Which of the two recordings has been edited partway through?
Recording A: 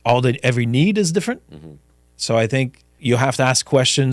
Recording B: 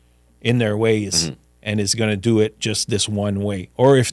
A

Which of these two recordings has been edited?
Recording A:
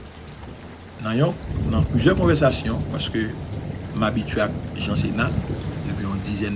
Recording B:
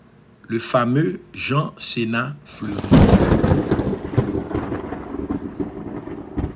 B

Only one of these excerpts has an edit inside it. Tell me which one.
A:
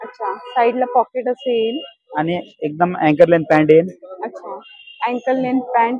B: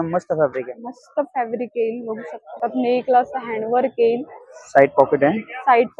B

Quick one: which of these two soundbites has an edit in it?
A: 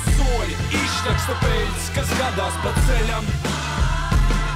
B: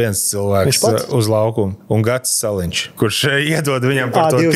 B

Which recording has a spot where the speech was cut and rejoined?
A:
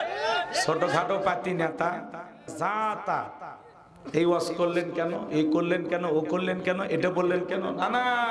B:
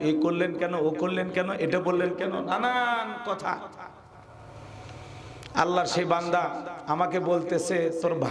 A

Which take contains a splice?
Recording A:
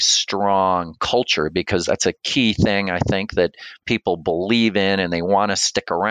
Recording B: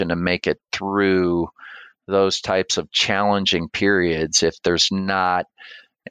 A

